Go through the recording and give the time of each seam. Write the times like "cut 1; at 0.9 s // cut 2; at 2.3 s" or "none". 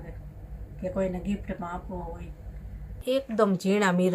cut 1; at 3.0 s